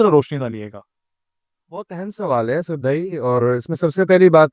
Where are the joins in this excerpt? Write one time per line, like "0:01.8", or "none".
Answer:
none